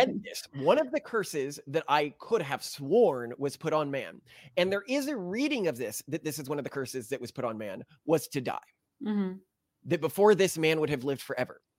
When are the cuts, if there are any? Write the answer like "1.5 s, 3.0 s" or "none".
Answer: none